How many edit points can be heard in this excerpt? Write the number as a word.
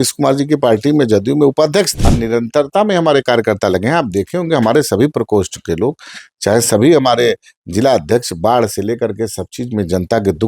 one